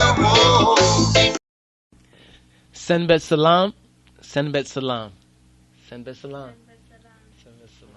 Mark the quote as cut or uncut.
cut